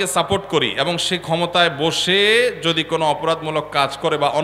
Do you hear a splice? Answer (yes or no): no